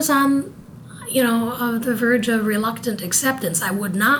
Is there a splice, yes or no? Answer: no